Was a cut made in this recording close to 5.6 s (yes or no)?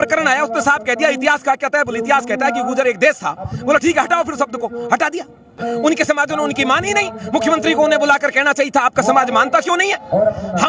yes